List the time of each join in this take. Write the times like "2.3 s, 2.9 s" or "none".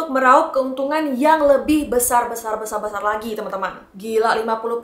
3.9 s